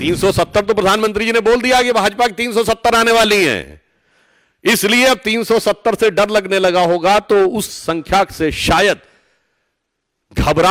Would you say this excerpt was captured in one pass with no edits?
yes; 0 cuts

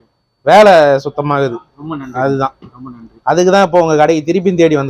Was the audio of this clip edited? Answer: no; 0 cuts

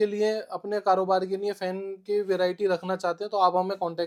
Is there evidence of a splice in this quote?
no; 0 cuts

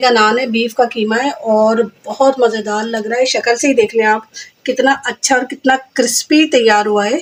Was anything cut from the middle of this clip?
no; 0 cuts

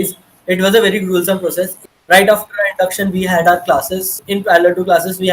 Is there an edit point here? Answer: yes; 2 cuts; at 1.8 s, 4.1 s

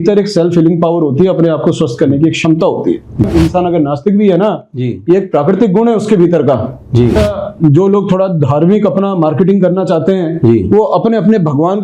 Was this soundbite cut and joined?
yes; 2 cuts; at 3.2 s, 7.2 s

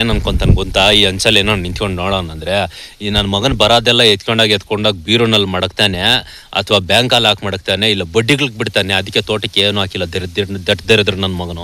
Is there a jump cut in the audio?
no; 0 cuts

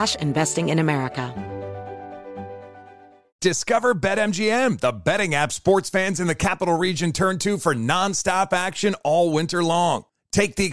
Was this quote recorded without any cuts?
no; 1 cut; at 1.3 s

